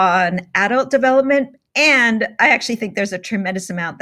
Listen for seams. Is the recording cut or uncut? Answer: uncut